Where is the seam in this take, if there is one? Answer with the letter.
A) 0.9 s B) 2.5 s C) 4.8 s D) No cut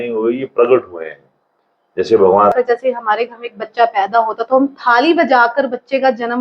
B